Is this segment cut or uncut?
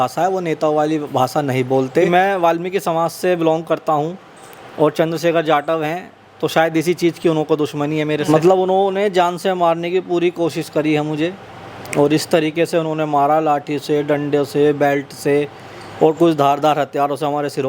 cut